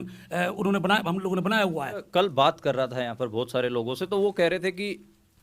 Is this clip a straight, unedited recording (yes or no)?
no